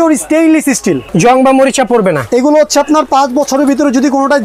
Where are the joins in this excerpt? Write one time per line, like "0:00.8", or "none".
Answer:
0:01.1